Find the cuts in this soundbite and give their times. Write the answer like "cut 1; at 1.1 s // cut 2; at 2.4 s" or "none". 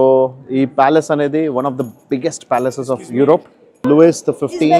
cut 1; at 3.7 s